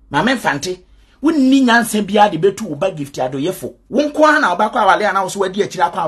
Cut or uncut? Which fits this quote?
cut